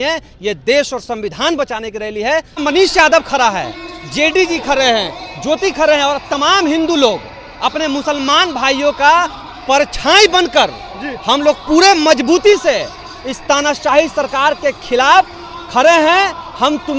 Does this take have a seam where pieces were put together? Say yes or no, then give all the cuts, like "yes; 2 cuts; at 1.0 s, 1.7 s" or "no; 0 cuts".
yes; 1 cut; at 2.6 s